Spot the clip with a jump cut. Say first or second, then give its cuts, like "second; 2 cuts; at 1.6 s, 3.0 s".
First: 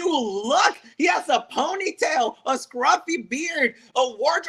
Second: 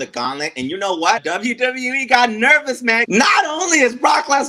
second; 2 cuts; at 1.2 s, 3.1 s